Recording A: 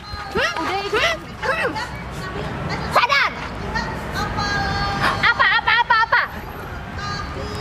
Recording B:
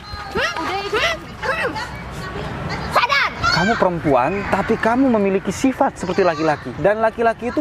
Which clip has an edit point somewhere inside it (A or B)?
B